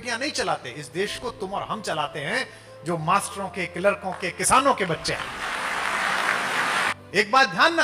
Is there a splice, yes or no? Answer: yes